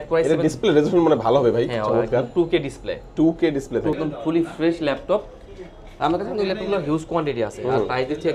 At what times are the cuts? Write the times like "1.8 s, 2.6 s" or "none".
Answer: 4.0 s